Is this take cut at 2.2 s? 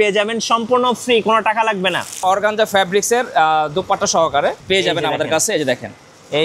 yes; 1 cut; at 2.2 s

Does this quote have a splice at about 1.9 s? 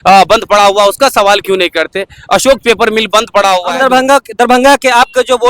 no; 1 cut; at 3.6 s

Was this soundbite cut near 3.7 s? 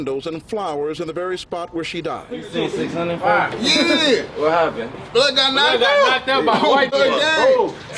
no; 1 cut; at 2.2 s

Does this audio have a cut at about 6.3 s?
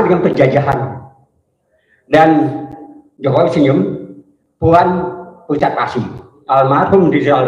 yes; 1 cut; at 6.3 s

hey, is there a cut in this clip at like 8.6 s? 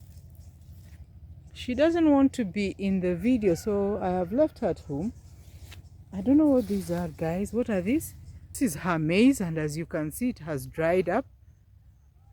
yes; 1 cut; at 8.6 s

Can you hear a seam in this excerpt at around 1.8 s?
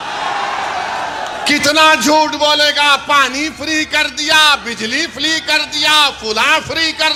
no; 0 cuts

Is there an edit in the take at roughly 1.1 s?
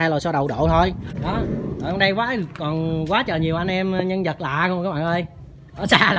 yes; 1 cut; at 1.1 s

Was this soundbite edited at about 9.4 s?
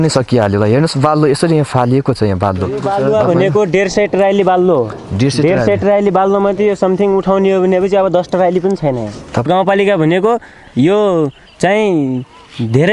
yes; 2 cuts; at 2.8 s, 9.4 s

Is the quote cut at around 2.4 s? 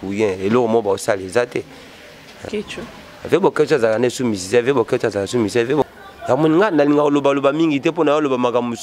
yes; 2 cuts; at 2.4 s, 5.9 s

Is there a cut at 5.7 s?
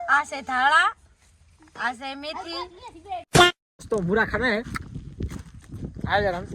no; 2 cuts; at 3.1 s, 3.8 s

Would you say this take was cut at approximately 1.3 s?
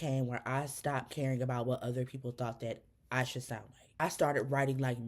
no; 1 cut; at 4.0 s

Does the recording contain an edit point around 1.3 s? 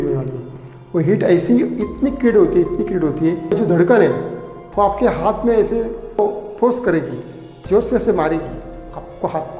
no; 2 cuts; at 3.6 s, 6.2 s

